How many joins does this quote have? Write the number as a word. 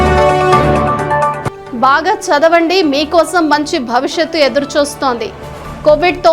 one